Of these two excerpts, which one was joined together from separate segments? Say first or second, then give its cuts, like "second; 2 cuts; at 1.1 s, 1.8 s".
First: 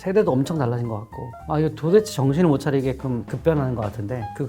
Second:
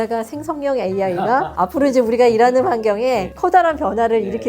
second; 2 cuts; at 1.5 s, 3.3 s